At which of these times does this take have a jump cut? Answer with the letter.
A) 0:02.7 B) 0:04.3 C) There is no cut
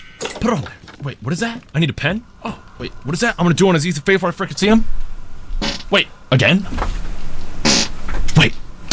C